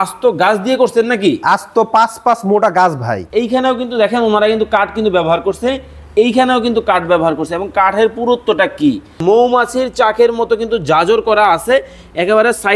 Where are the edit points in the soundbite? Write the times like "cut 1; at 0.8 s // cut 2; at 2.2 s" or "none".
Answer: cut 1; at 3.1 s // cut 2; at 9.2 s